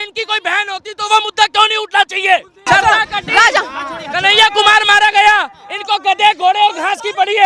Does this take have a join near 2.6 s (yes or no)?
yes